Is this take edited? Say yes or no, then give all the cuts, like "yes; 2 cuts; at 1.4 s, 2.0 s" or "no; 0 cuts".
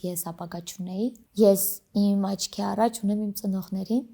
yes; 1 cut; at 1.2 s